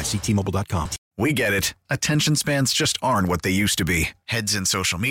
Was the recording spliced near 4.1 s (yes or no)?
no